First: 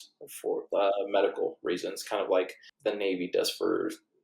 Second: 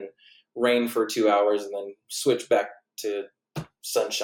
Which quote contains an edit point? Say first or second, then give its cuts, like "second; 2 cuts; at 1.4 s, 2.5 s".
first; 1 cut; at 2.6 s